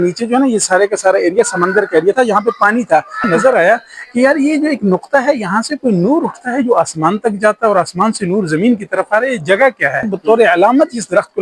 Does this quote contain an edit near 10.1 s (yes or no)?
yes